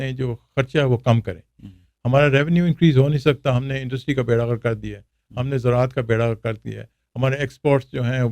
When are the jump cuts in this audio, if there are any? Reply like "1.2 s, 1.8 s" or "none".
none